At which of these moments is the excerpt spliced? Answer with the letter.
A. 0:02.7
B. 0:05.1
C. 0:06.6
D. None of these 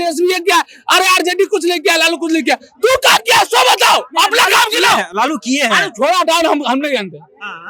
D